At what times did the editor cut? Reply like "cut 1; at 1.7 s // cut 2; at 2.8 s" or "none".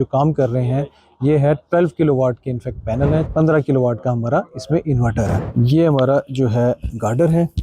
cut 1; at 3.3 s // cut 2; at 5.5 s